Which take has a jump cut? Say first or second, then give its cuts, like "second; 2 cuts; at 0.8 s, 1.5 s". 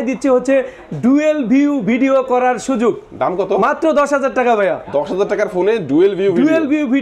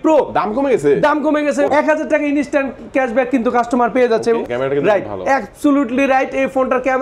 second; 2 cuts; at 1.7 s, 4.4 s